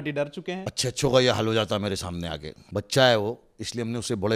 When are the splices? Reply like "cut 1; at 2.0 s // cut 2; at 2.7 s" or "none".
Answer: none